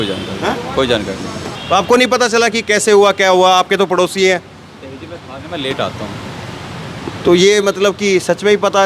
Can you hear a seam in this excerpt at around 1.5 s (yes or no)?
yes